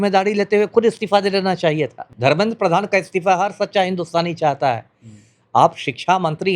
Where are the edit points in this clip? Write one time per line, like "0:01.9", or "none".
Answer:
0:02.1